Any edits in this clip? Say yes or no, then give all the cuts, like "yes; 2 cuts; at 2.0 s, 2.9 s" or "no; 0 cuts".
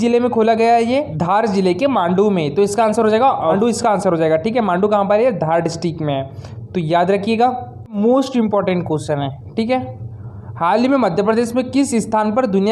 yes; 3 cuts; at 1.1 s, 3.6 s, 8.0 s